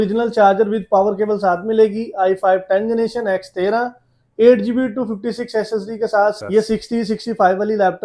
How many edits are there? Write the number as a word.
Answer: one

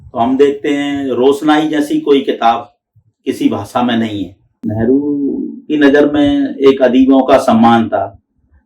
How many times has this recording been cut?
one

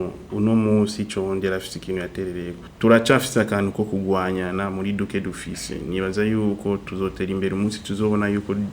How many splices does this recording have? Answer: one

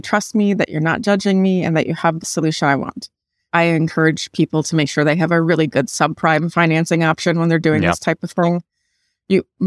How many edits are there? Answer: one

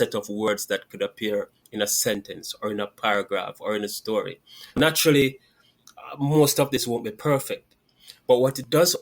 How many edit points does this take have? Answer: one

